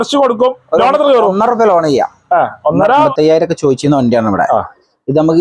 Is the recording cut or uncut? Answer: cut